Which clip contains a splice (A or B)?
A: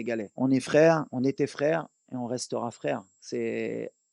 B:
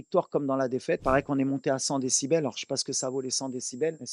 B